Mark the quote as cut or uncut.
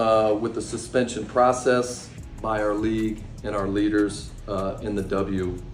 uncut